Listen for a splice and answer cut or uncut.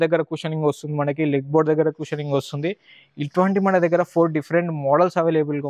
uncut